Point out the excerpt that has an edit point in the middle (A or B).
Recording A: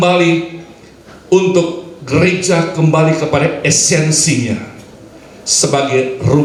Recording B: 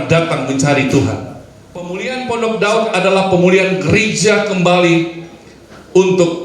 B